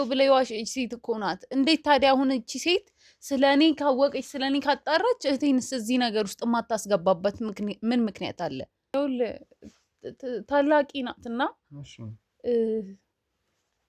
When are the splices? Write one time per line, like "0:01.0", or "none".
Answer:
0:08.9